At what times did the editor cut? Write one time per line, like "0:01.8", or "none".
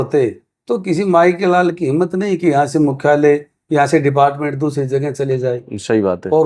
none